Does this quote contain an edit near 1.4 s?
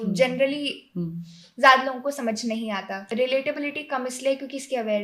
no; 1 cut; at 3.0 s

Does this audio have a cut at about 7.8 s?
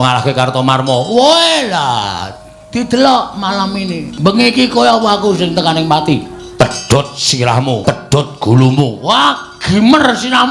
yes; 2 cuts; at 4.1 s, 7.8 s

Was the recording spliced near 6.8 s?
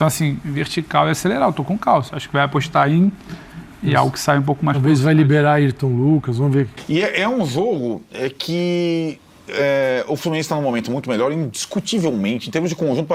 yes; 1 cut; at 6.8 s

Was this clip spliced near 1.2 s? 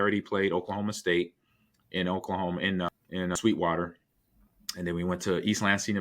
no; 1 cut; at 3.3 s

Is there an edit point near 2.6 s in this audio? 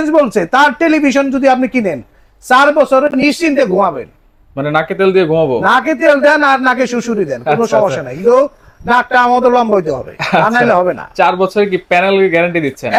no; 0 cuts

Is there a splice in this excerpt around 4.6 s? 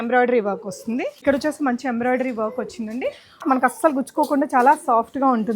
no; 2 cuts; at 1.2 s, 3.4 s

